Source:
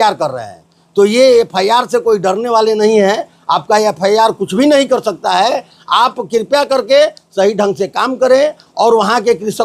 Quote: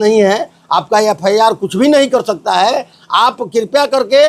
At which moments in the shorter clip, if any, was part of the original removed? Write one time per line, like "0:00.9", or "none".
none